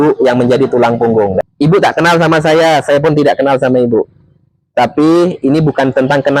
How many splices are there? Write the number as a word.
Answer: one